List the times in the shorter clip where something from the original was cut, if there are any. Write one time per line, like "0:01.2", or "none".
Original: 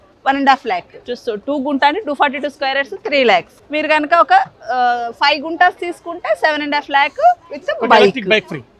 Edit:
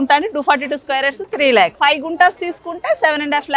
0:01.8